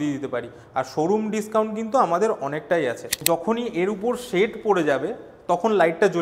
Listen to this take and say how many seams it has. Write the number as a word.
one